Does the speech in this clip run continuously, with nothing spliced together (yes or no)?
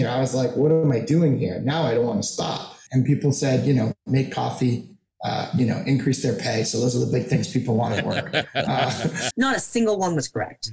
no